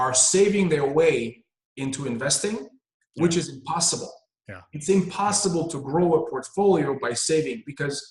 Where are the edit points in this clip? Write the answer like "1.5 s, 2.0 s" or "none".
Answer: none